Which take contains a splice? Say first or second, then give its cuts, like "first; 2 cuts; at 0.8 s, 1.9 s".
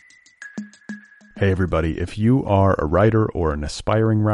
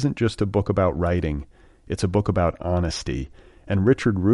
first; 1 cut; at 0.9 s